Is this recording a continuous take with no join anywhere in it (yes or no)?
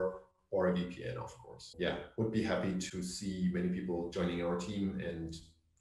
no